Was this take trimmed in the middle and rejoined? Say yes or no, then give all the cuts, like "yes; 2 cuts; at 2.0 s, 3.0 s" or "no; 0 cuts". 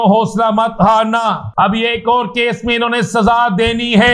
yes; 1 cut; at 1.6 s